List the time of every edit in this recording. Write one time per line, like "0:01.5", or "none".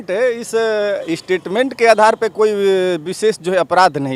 none